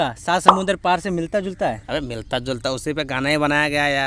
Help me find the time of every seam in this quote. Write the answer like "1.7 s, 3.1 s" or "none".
none